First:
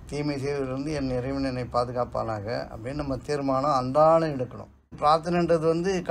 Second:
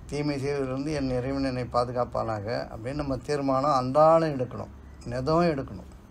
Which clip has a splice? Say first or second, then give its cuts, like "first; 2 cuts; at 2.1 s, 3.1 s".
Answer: first; 1 cut; at 4.9 s